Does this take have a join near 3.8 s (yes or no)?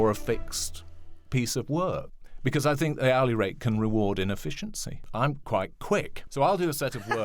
no